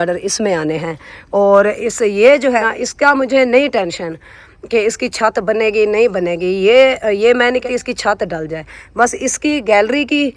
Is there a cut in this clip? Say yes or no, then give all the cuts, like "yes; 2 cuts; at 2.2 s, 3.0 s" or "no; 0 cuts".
yes; 2 cuts; at 2.6 s, 7.7 s